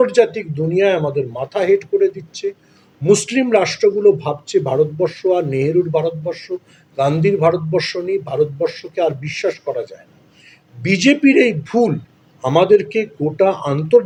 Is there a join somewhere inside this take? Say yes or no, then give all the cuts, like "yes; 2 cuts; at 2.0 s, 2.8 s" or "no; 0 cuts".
no; 0 cuts